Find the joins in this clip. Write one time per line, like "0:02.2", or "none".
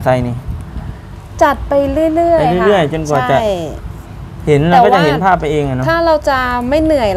none